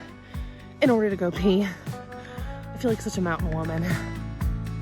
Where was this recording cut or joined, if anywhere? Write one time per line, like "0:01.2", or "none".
0:03.9